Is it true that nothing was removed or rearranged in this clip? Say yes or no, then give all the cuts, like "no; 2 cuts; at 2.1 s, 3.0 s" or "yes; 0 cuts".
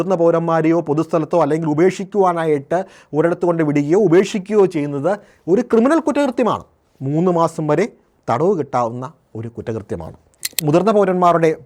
no; 1 cut; at 10.5 s